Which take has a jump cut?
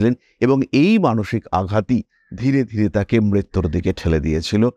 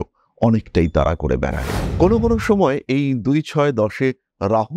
second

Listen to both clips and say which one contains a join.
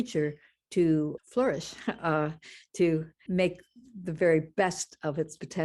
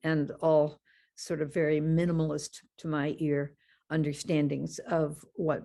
first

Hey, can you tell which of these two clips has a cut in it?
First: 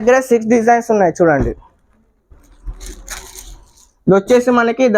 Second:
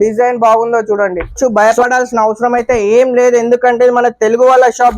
second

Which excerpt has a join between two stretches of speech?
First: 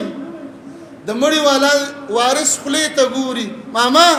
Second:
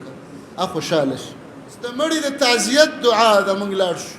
second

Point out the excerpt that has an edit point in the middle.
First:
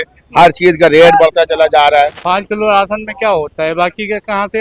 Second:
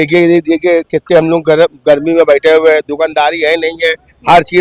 first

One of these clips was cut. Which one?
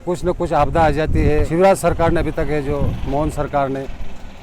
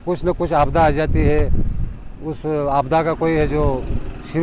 first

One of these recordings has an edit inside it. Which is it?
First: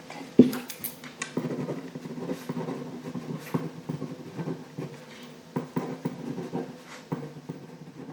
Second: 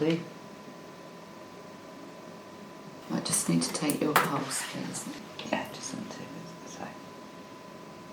second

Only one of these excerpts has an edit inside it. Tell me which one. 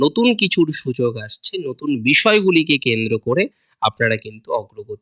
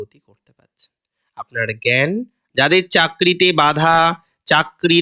second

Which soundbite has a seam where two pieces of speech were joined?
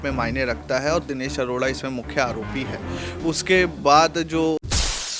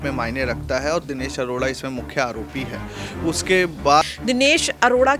second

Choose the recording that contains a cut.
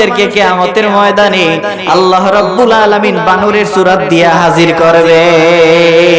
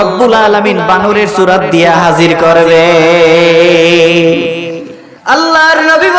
second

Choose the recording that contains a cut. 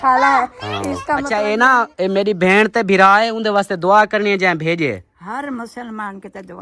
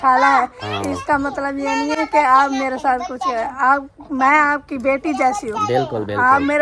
first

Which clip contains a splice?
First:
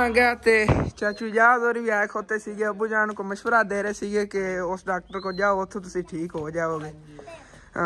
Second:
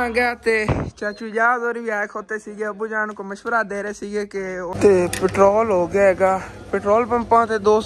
second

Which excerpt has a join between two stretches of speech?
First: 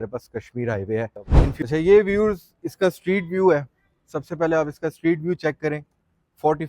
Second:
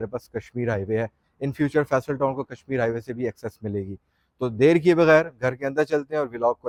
first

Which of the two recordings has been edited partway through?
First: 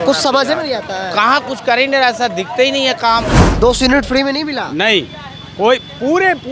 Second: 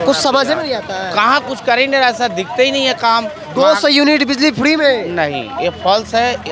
first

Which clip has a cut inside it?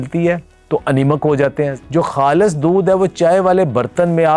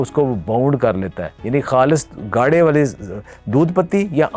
first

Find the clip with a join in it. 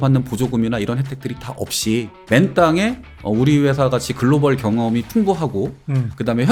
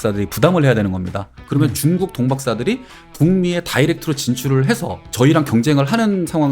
second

